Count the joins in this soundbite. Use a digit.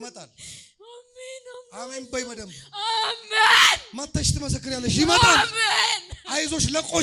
0